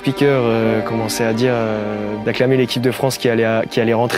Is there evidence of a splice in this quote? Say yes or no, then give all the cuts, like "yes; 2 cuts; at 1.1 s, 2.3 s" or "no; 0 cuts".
yes; 1 cut; at 2.1 s